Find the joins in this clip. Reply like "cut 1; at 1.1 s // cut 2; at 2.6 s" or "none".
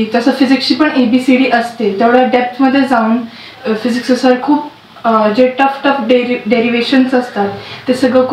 none